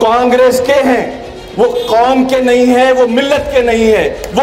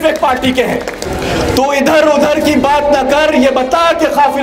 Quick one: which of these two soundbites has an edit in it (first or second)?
second